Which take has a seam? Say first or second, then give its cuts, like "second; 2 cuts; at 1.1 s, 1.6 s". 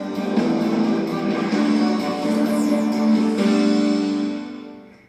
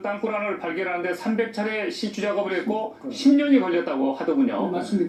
first; 1 cut; at 3.4 s